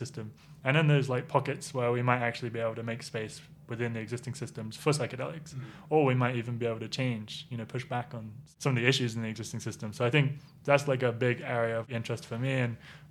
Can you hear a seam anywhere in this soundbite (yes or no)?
yes